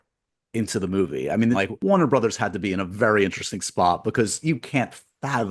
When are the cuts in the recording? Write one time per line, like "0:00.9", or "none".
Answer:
0:01.6